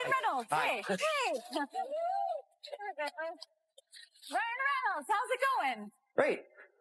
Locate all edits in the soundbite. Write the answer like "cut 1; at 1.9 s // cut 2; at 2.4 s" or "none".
none